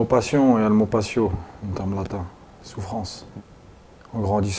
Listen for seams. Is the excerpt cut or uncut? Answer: cut